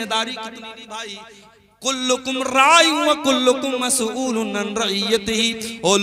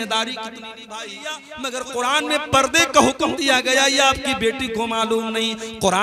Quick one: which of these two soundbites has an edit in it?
second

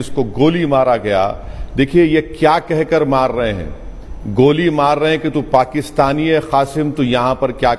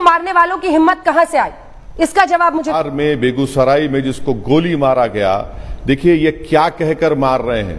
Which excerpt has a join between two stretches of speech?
second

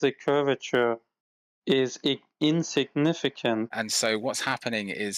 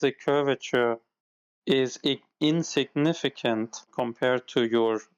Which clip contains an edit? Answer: first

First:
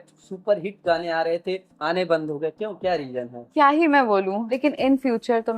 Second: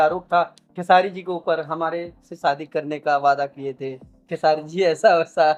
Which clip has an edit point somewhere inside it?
first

